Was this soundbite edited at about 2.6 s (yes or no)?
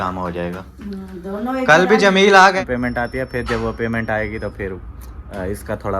yes